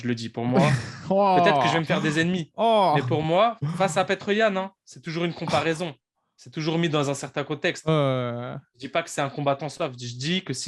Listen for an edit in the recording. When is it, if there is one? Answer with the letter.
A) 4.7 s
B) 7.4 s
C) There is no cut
C